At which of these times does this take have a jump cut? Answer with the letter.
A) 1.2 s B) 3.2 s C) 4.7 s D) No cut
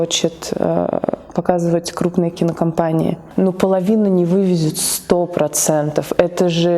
B